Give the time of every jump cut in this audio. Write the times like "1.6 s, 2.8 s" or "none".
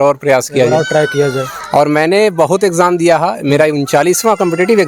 none